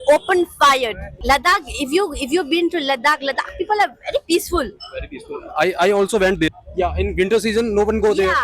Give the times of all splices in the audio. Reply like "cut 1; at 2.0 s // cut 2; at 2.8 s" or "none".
cut 1; at 1.0 s // cut 2; at 6.6 s